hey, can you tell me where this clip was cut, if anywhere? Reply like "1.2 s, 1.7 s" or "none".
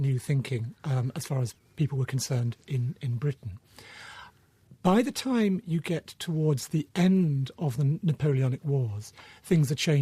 4.3 s

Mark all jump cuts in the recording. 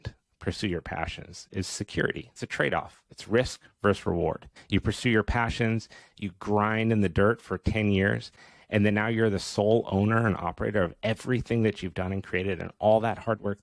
2.4 s, 4.5 s

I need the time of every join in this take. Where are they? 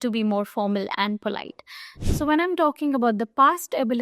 2.0 s

